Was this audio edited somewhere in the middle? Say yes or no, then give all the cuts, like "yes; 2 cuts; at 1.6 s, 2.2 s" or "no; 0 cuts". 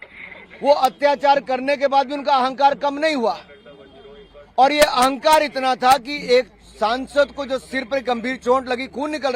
no; 0 cuts